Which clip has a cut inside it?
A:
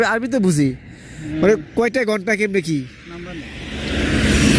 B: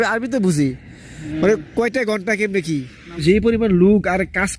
B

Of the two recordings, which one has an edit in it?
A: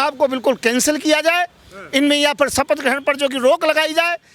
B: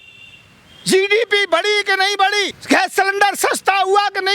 B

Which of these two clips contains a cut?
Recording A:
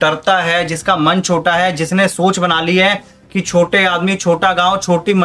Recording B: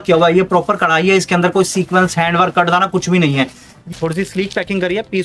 B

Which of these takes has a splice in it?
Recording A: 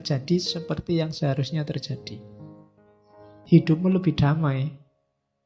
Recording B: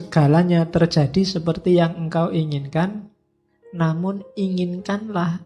A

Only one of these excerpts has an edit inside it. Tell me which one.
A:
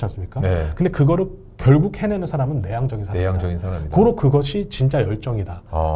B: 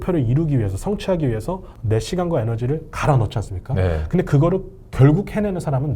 B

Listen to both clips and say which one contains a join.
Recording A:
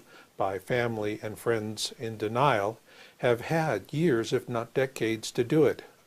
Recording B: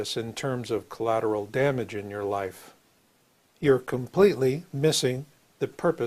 A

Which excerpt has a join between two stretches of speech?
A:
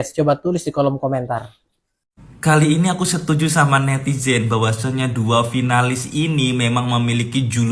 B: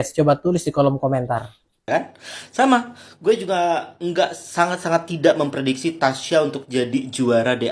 B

